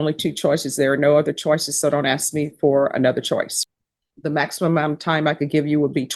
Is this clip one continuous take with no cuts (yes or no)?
no